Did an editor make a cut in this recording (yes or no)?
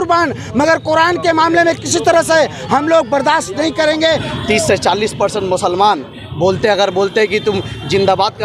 yes